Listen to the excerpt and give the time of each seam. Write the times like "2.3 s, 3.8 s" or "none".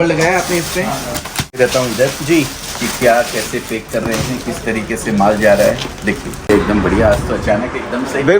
1.5 s, 6.5 s